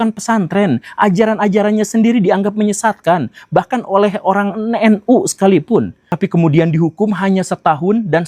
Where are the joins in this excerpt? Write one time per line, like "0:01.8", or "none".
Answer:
0:06.0